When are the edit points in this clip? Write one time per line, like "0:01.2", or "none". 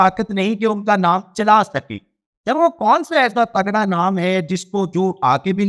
none